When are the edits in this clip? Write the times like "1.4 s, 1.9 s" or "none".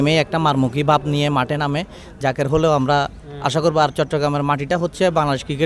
none